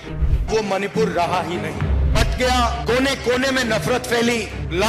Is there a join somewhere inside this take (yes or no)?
no